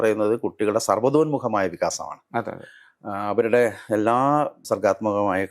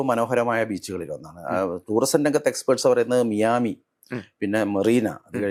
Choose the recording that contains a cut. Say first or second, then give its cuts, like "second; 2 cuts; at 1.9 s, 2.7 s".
first; 1 cut; at 4.6 s